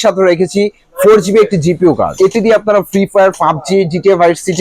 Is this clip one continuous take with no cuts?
no; 1 cut; at 2.1 s

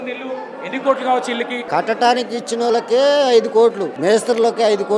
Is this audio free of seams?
no; 2 cuts; at 1.6 s, 3.9 s

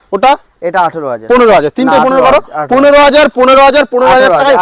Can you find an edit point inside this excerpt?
no; 0 cuts

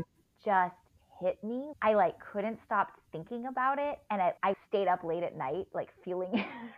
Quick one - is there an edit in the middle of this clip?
no; 0 cuts

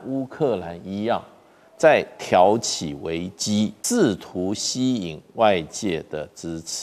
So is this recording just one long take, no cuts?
no; 1 cut; at 3.8 s

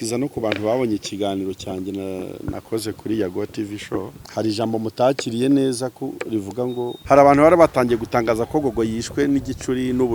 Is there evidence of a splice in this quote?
yes; 2 cuts; at 4.2 s, 6.9 s

